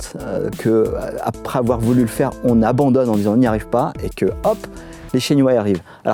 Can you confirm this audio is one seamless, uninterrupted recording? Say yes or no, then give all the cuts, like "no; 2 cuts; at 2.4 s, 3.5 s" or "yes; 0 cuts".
yes; 0 cuts